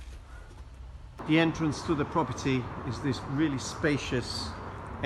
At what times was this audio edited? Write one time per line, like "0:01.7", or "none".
0:01.1